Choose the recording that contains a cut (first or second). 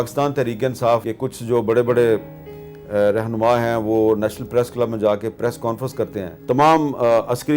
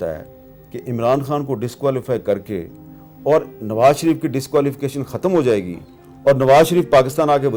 first